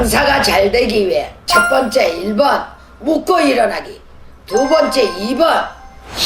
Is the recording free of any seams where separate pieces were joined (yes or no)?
yes